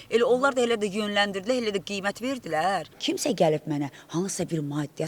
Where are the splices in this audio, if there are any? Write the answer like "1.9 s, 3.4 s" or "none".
2.9 s